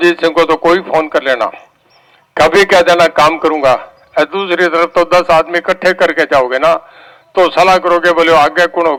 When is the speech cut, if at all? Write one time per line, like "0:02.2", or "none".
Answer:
none